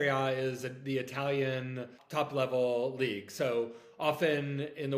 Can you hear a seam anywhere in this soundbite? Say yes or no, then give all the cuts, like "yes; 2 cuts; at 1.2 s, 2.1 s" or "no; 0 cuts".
yes; 1 cut; at 2.0 s